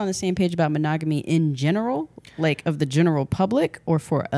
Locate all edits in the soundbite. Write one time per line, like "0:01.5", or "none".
none